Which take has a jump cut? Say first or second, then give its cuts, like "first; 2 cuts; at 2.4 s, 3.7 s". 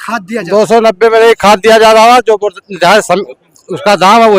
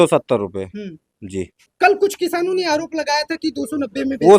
second; 1 cut; at 1.6 s